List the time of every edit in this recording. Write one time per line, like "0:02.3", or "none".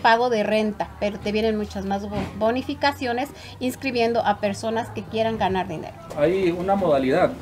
0:06.1